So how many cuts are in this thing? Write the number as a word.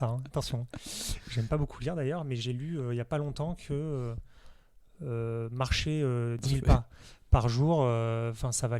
one